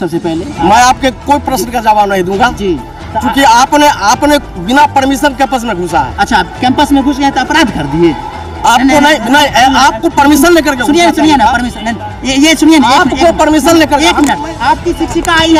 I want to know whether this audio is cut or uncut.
uncut